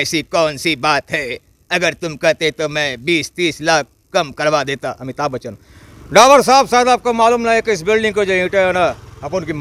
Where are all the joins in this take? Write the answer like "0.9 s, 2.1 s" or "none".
none